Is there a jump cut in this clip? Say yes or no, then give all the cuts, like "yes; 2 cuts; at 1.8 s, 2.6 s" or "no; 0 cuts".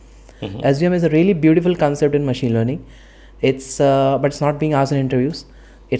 no; 0 cuts